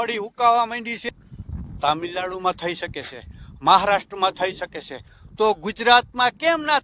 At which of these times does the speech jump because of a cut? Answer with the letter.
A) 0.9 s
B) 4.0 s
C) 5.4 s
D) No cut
A